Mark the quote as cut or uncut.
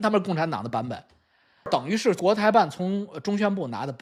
uncut